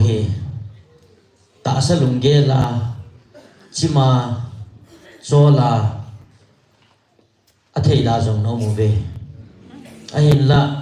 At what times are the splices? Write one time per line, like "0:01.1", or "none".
none